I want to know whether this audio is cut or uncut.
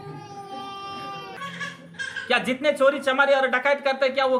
cut